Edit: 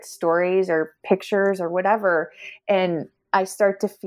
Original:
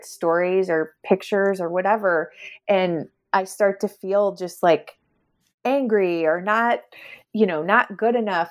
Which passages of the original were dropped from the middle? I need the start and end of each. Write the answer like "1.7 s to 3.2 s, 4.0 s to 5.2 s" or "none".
none